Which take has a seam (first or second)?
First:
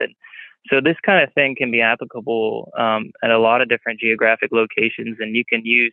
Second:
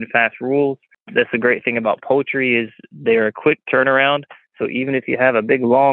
second